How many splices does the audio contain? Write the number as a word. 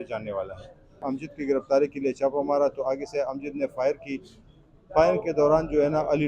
one